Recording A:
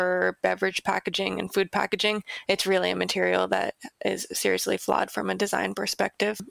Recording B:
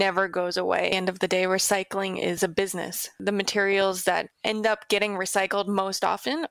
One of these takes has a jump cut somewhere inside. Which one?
B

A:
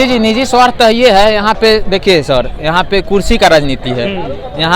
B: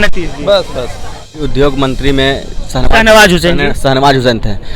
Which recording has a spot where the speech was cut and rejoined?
B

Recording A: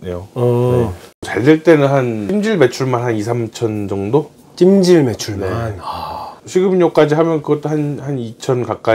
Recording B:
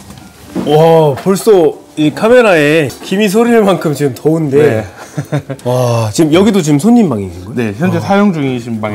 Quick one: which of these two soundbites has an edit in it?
A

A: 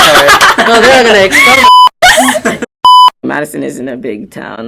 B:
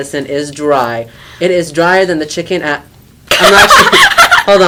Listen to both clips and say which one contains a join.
A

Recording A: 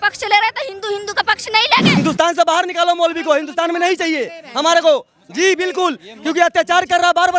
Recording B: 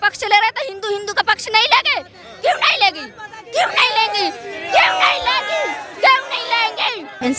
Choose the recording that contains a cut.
A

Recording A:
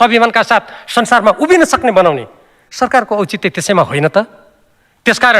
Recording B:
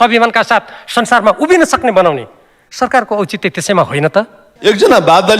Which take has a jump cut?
B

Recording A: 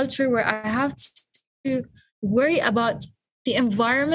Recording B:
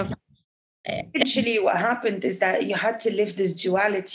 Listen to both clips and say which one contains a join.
B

